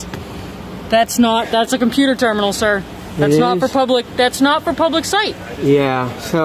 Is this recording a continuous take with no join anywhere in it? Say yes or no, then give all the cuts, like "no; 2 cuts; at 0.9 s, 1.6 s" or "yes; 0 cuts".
yes; 0 cuts